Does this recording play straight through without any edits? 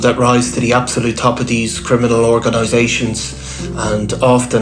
yes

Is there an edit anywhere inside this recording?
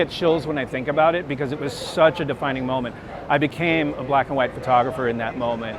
no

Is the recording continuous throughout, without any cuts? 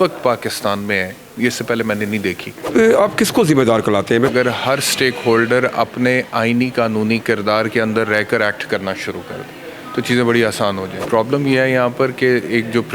no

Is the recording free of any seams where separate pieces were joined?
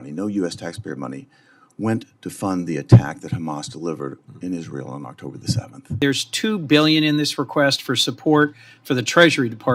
no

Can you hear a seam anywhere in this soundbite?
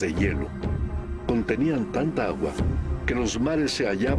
no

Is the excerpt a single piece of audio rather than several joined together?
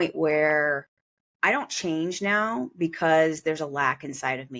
yes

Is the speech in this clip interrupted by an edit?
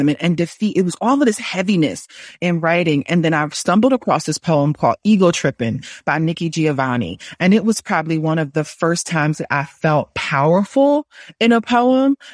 no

